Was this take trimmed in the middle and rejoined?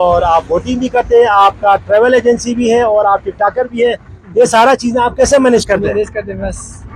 no; 0 cuts

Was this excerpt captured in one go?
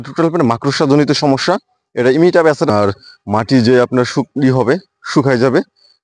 no; 1 cut; at 2.7 s

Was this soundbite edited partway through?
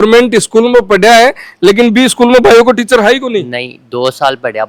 no; 0 cuts

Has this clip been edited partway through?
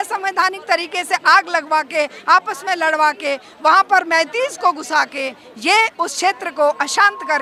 no; 0 cuts

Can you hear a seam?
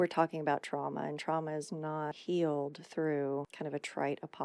yes; 2 cuts; at 2.2 s, 3.5 s

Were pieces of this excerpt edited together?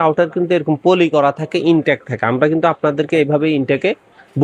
no; 0 cuts

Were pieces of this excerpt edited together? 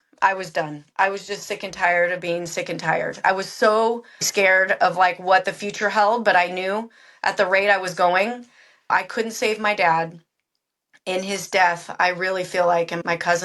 yes; 3 cuts; at 3.2 s, 4.3 s, 8.9 s

